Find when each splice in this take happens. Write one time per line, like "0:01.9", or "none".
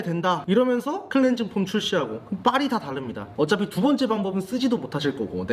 0:03.3